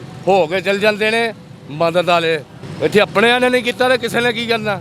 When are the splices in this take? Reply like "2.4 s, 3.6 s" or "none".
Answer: 2.6 s

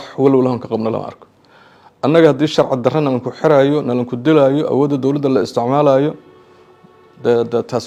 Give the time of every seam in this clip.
none

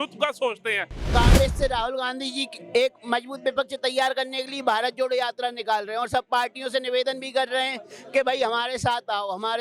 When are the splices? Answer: 1.1 s

